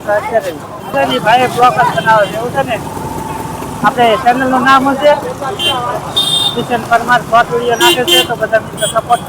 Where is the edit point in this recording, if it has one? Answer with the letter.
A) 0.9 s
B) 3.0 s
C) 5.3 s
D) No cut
A